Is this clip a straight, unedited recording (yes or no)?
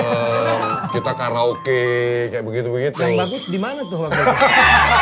yes